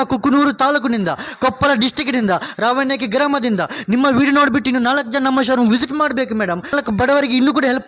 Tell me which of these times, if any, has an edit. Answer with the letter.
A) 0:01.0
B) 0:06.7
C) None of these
B